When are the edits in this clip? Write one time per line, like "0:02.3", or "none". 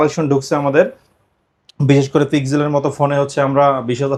none